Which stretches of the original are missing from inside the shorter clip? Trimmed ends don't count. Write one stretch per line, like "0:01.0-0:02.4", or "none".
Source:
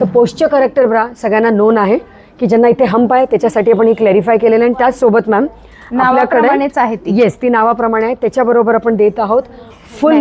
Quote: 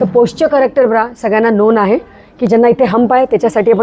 none